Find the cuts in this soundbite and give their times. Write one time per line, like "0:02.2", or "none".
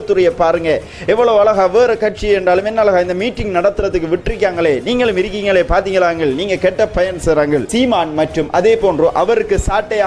0:07.7